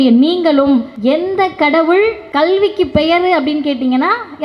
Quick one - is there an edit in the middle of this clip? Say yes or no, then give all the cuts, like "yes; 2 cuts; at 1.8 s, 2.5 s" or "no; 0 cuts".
yes; 2 cuts; at 0.9 s, 2.2 s